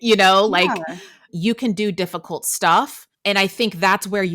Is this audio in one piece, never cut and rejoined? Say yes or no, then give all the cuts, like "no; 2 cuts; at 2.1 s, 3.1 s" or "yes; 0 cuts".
no; 2 cuts; at 1.3 s, 3.1 s